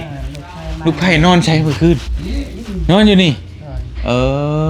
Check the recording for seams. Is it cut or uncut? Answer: uncut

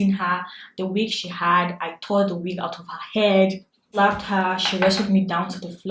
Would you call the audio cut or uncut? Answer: uncut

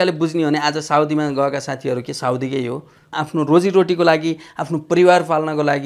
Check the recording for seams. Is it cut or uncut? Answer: cut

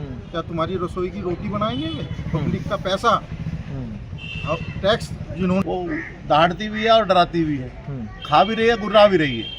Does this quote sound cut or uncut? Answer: cut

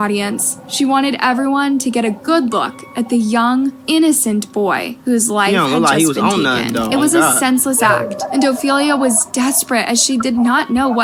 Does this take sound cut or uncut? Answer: uncut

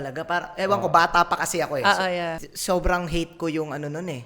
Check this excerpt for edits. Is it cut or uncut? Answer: cut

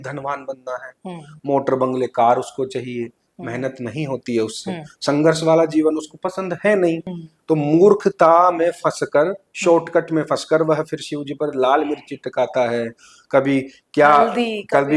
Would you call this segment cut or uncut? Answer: uncut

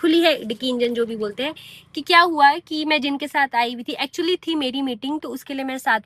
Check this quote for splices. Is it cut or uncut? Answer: uncut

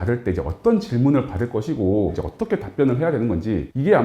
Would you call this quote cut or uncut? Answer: cut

